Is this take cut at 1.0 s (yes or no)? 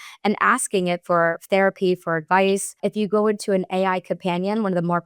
no